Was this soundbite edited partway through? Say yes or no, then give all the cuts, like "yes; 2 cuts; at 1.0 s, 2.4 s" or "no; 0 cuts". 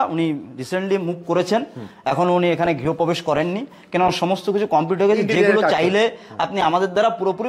no; 0 cuts